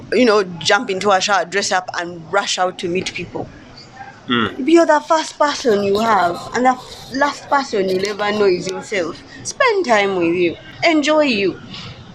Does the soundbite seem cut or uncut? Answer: uncut